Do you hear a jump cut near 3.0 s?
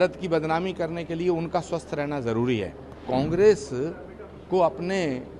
yes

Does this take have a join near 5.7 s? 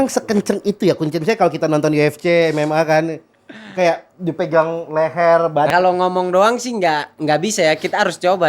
yes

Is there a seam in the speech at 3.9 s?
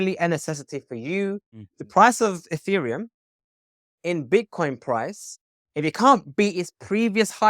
no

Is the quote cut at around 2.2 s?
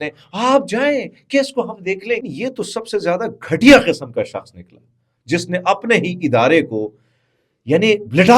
yes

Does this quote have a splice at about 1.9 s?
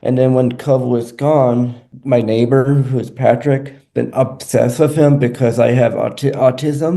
yes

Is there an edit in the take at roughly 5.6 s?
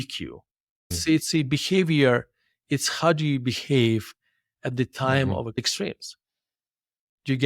yes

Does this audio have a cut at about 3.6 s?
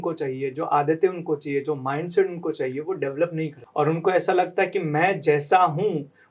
yes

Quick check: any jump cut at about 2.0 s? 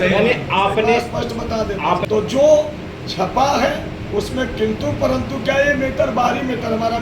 yes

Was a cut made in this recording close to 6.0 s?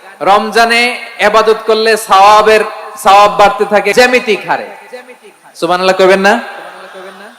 no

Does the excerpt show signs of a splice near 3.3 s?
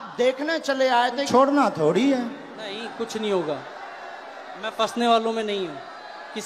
no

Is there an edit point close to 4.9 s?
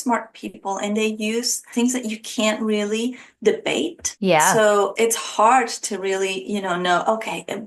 yes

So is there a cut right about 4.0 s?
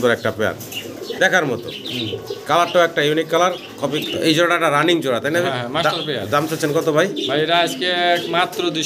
yes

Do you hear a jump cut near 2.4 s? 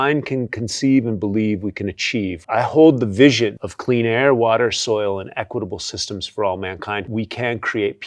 yes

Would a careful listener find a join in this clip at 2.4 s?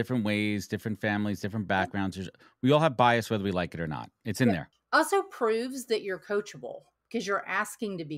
no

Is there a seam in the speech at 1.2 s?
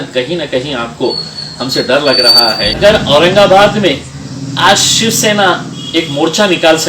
no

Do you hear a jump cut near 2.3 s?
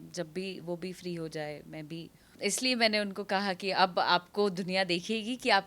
yes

